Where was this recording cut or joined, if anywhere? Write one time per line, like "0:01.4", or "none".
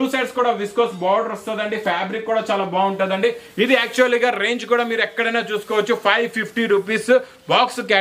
none